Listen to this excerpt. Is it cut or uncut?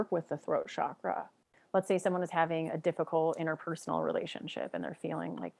cut